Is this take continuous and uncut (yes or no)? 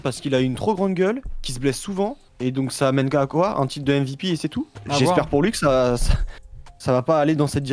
no